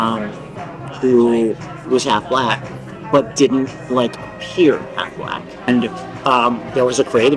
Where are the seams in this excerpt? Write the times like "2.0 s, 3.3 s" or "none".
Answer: 5.7 s